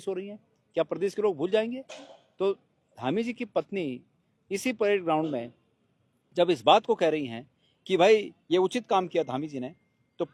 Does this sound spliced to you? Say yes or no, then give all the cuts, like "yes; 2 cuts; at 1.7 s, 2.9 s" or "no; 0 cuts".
no; 0 cuts